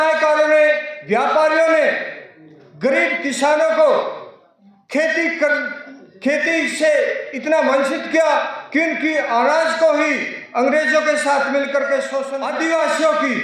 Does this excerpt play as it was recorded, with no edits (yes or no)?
no